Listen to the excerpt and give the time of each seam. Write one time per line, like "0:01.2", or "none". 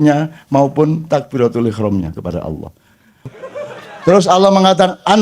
0:03.3